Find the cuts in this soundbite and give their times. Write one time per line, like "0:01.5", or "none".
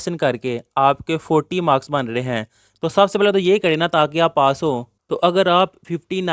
0:05.0